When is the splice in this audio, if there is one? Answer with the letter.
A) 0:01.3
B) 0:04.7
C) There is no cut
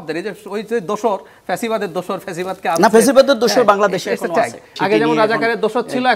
B